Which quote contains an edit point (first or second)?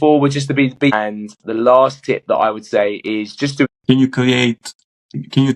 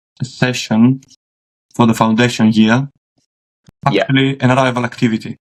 first